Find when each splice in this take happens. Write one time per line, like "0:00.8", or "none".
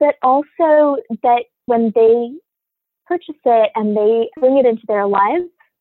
0:01.7
0:04.3

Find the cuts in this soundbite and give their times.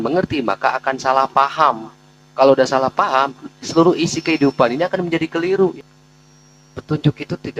0:05.7

